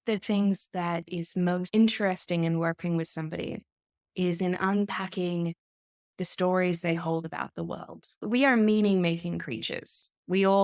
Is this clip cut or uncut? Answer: cut